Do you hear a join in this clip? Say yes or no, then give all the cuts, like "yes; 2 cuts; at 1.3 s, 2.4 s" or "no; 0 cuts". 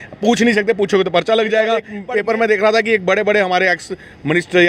yes; 1 cut; at 2.0 s